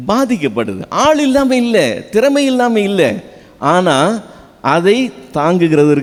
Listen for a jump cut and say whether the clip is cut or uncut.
uncut